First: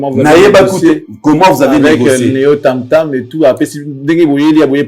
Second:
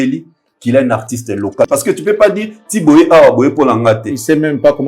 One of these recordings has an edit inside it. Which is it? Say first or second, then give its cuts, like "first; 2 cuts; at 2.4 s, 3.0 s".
second; 1 cut; at 1.7 s